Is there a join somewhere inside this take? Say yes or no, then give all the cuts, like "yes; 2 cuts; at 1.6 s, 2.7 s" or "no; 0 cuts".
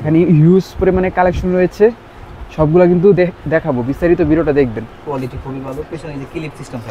yes; 1 cut; at 4.9 s